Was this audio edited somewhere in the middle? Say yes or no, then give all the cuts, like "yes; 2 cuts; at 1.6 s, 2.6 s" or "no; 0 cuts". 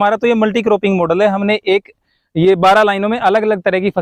no; 0 cuts